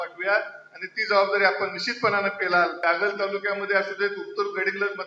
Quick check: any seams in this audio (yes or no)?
yes